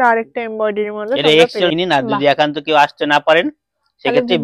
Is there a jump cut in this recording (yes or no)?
yes